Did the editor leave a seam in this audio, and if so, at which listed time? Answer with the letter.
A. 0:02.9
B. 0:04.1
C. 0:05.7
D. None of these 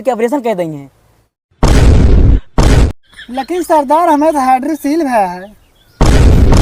A